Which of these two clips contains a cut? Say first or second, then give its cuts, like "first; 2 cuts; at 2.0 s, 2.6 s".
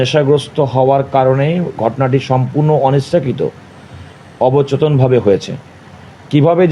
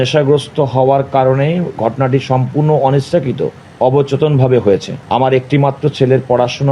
second; 2 cuts; at 3.6 s, 4.9 s